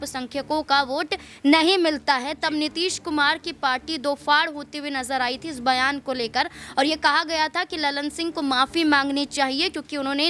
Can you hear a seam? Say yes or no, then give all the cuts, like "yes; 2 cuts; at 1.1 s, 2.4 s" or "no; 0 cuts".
no; 0 cuts